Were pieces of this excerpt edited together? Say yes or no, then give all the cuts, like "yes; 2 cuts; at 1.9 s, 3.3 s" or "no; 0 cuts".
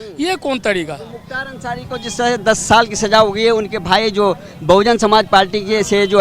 no; 0 cuts